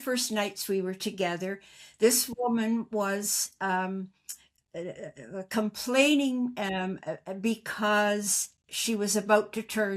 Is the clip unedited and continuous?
yes; 0 cuts

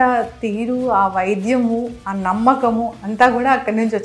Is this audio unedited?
yes; 0 cuts

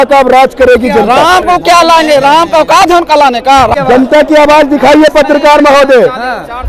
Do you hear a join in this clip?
yes; 2 cuts; at 1.0 s, 3.7 s

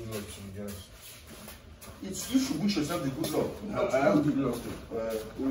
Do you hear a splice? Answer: no; 0 cuts

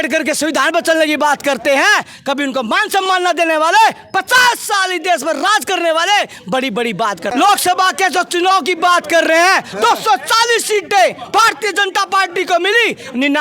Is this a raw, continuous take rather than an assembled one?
no; 1 cut; at 7.3 s

